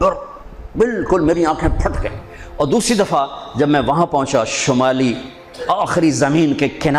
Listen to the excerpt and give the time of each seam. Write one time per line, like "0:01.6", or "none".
none